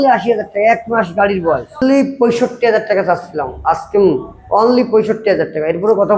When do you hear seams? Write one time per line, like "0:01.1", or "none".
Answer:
0:01.8

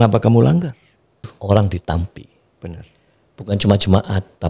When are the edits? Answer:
0:01.3

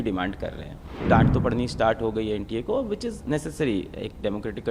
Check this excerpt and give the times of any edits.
0:01.0

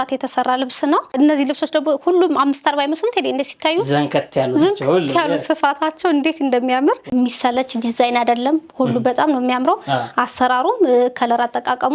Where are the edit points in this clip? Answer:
0:01.1
0:07.1

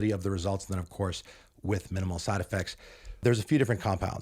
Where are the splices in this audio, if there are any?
none

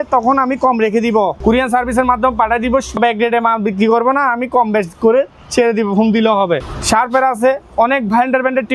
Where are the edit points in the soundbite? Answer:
0:01.4
0:03.0
0:06.7

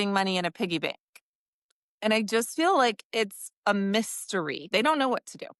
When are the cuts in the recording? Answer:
0:04.7

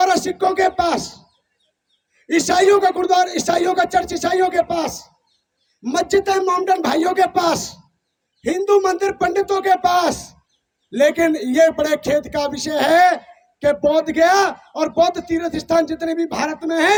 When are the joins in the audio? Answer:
none

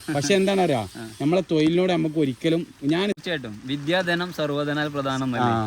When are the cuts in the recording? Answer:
0:03.2

